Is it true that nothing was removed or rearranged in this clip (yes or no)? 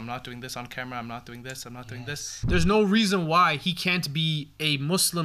no